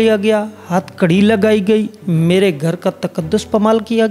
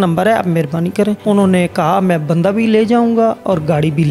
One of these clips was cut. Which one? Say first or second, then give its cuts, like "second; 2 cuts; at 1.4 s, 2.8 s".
second; 1 cut; at 1.2 s